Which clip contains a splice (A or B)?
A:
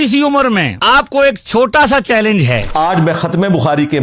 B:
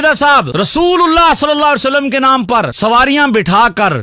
A